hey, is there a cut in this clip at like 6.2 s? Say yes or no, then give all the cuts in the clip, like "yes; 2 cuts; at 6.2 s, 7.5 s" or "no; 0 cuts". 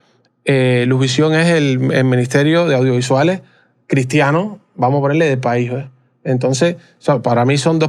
no; 0 cuts